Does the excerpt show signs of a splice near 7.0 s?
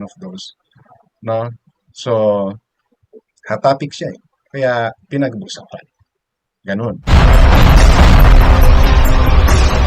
yes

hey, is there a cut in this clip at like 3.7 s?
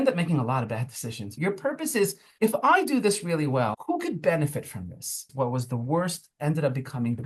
yes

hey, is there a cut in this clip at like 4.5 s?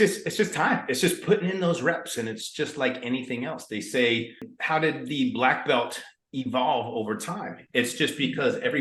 yes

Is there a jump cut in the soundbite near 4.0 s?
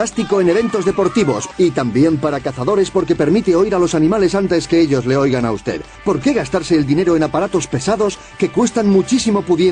no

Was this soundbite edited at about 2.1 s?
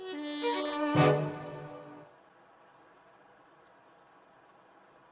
yes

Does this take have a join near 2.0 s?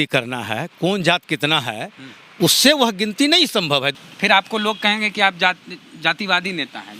no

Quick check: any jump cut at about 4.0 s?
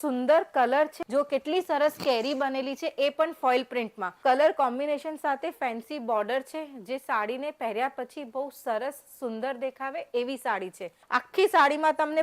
yes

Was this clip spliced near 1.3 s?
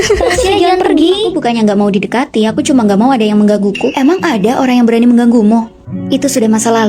yes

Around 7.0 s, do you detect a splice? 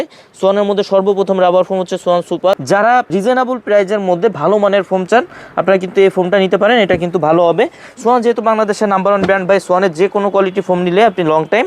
no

